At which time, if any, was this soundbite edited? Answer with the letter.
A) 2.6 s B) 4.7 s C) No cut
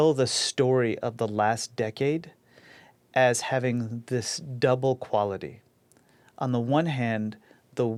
C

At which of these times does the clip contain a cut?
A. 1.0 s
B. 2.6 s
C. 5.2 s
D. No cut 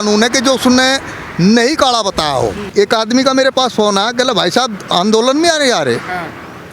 B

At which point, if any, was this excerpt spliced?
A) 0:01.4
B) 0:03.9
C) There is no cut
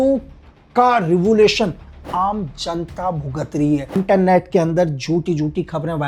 B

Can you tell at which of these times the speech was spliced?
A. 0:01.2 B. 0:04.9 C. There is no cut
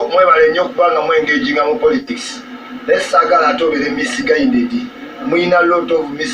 C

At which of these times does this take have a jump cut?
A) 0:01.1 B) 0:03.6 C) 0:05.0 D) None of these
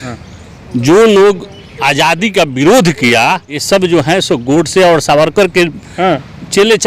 B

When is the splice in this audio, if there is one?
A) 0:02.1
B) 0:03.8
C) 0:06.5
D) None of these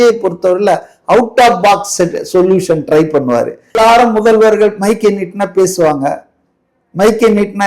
B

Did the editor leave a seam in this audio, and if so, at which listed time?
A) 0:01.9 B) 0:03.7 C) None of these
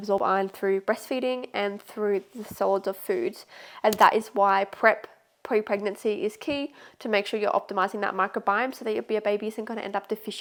C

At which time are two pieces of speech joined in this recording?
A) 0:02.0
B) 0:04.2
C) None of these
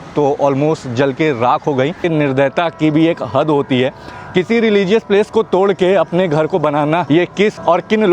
A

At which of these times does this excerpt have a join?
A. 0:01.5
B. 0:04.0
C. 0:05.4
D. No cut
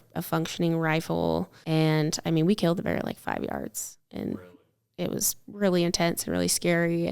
A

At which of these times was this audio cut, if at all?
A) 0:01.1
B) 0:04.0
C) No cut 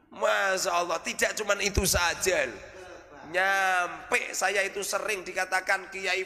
C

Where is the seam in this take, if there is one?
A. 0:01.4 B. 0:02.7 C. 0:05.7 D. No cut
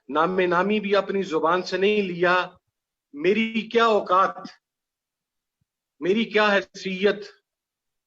D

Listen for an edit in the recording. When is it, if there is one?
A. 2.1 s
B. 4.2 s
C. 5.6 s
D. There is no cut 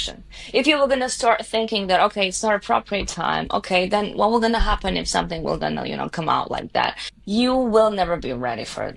D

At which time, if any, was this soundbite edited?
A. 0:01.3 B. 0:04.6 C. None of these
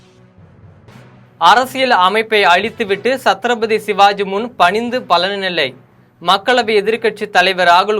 A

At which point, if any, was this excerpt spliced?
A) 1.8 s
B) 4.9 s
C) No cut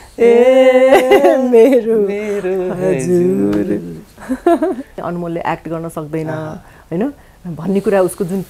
B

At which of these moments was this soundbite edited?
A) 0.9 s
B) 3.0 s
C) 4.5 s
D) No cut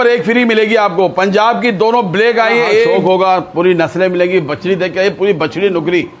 B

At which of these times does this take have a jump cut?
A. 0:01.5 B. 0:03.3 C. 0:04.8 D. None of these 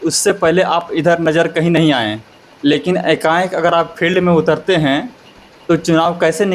D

